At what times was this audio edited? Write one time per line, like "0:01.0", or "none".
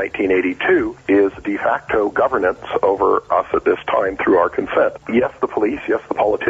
0:01.0
0:03.3
0:05.0

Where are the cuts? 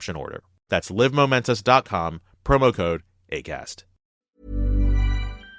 0:04.0

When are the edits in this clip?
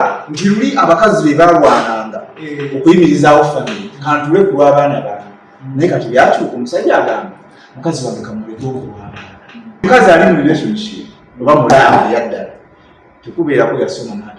0:09.8

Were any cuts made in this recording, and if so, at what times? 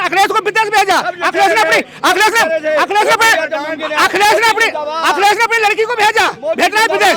none

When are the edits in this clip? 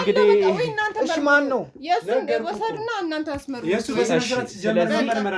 none

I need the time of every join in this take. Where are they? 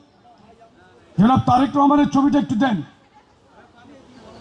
none

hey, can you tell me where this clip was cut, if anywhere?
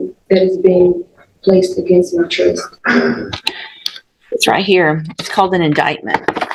none

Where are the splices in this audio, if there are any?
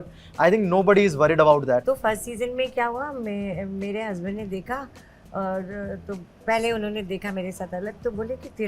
0:01.8

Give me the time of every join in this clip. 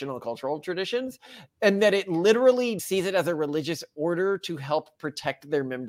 0:02.8

